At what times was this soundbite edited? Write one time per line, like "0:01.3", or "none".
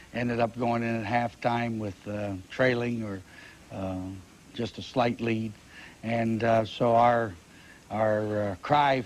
0:07.7